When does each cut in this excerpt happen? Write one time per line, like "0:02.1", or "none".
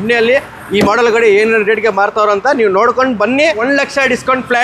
0:03.6